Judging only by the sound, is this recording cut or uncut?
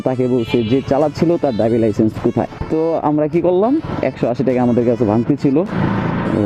cut